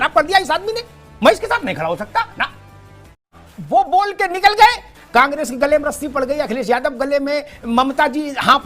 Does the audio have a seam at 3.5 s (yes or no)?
yes